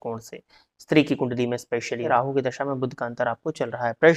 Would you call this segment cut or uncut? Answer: cut